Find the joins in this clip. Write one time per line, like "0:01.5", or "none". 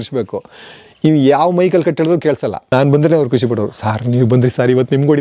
0:02.6